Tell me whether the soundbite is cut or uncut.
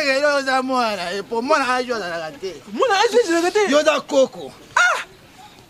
uncut